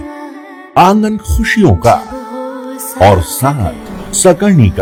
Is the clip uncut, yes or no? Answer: yes